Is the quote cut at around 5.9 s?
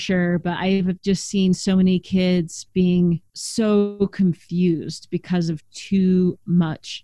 no; 1 cut; at 3.4 s

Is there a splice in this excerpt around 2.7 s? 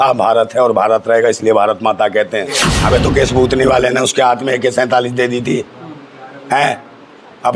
yes; 1 cut; at 2.7 s

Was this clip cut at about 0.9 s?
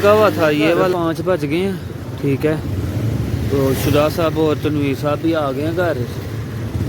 yes; 1 cut; at 0.9 s

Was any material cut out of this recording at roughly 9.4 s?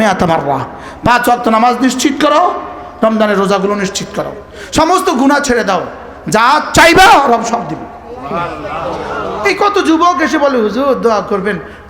yes; 1 cut; at 9.4 s

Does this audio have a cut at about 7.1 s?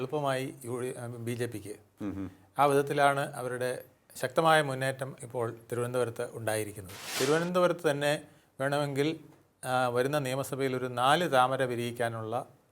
yes; 1 cut; at 7.1 s

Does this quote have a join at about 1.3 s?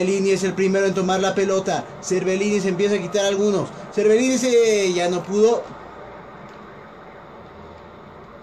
no; 1 cut; at 5.7 s

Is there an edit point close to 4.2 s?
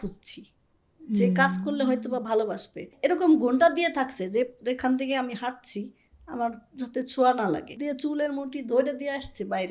no; 2 cuts; at 2.9 s, 7.7 s

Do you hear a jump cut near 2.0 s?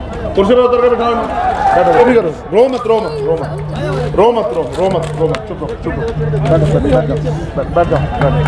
yes; 1 cut; at 2.0 s

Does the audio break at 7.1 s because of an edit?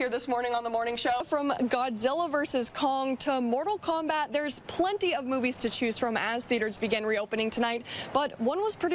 no; 1 cut; at 1.2 s

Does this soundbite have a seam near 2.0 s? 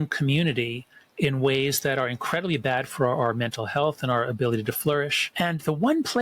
no; 1 cut; at 5.2 s

